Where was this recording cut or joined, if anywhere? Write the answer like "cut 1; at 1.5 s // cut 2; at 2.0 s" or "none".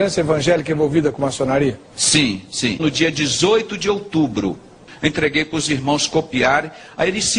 cut 1; at 4.9 s